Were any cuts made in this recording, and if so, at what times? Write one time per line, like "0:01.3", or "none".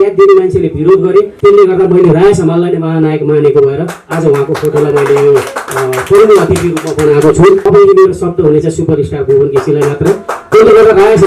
0:01.3
0:07.6